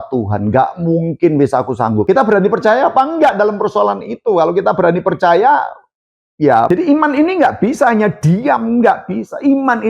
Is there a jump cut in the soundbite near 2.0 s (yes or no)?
yes